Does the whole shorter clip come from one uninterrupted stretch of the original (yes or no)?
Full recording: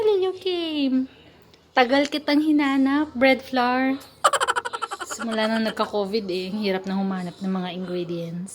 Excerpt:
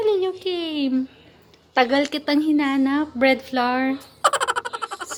yes